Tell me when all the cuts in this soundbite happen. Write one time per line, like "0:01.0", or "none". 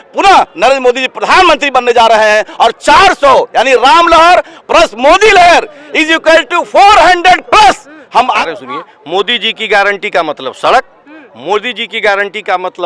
0:08.4